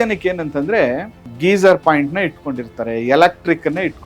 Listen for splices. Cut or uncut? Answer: cut